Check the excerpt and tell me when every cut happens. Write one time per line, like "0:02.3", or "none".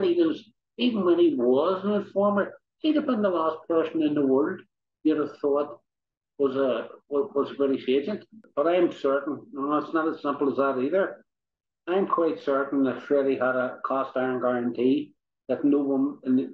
0:08.4